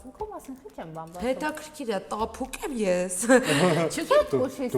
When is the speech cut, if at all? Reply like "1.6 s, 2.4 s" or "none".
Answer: none